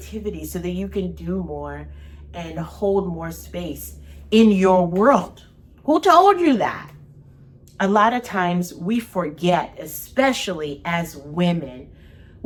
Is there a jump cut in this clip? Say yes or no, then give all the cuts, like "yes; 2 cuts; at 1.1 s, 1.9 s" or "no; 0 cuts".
no; 0 cuts